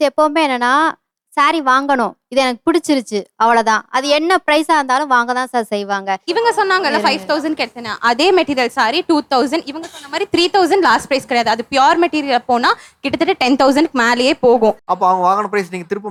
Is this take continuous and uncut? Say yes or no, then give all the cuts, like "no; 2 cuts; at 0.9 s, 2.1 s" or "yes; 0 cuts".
yes; 0 cuts